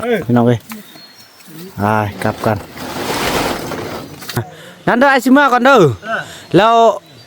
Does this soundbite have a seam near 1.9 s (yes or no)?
no